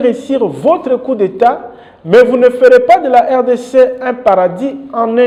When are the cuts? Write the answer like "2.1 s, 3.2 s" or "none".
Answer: none